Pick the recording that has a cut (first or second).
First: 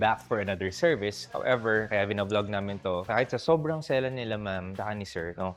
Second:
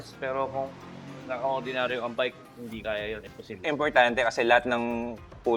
second